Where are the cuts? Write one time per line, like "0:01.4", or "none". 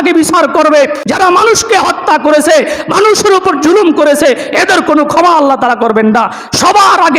0:01.0

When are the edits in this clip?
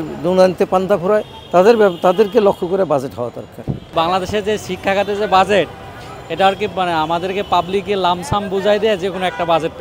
0:03.9

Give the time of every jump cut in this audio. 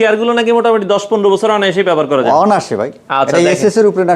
none

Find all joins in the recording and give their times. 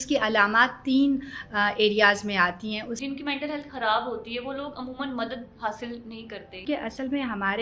0:02.9
0:06.6

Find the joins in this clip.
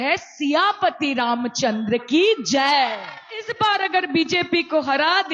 0:03.5

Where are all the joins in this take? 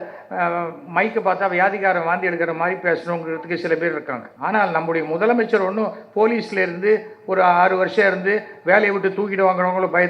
0:04.3

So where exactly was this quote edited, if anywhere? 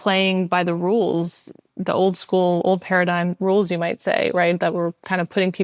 none

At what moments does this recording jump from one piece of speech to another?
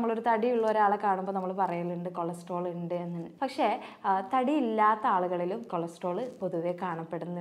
0:03.3

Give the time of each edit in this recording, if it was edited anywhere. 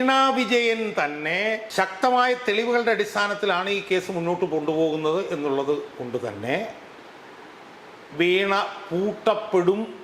0:01.6

